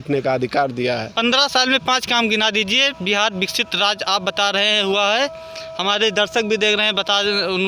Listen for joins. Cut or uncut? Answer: cut